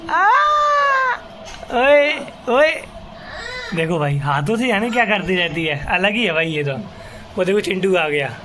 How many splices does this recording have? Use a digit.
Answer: 0